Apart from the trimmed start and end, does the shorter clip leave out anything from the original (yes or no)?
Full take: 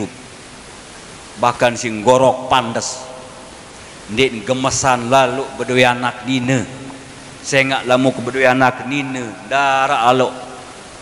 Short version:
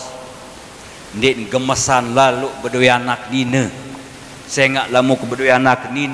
no